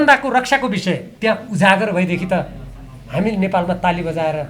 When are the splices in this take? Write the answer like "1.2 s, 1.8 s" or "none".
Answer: 1.1 s